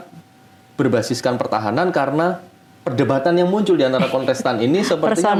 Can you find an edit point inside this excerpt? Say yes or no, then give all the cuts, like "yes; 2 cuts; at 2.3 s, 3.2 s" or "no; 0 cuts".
no; 0 cuts